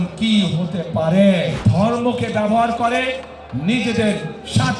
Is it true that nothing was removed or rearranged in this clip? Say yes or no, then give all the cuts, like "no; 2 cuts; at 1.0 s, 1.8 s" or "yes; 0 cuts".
no; 1 cut; at 1.6 s